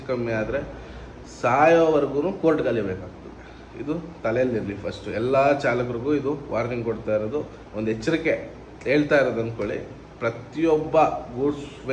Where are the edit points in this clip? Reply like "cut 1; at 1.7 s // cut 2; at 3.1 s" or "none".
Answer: none